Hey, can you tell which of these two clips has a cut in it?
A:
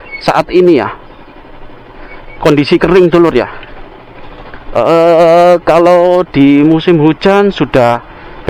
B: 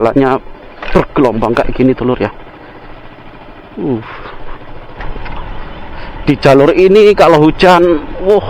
B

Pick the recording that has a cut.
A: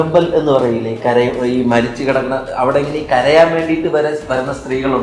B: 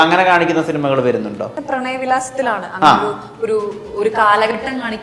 B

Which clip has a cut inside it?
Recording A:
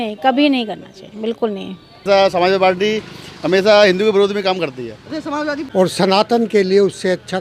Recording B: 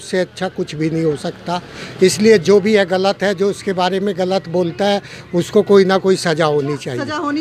A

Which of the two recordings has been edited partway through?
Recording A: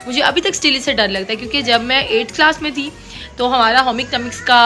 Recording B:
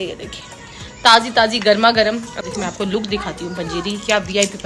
B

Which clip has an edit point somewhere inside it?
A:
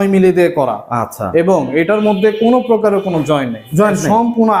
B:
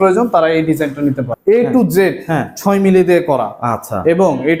B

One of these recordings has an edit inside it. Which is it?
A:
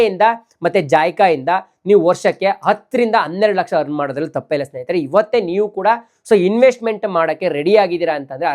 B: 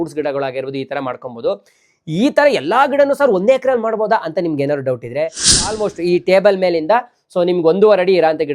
B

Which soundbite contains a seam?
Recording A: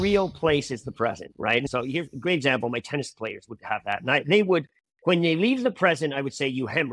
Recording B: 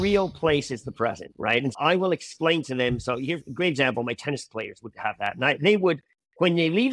A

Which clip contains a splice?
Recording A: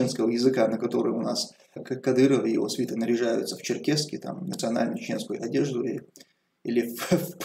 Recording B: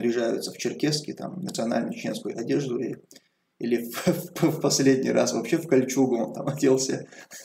A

